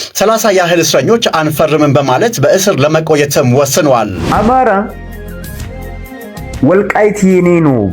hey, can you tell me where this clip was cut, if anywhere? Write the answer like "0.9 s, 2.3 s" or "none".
4.2 s